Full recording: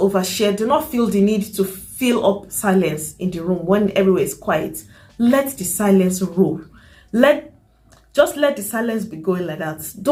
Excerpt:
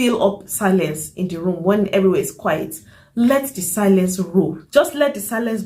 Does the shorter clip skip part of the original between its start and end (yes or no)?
yes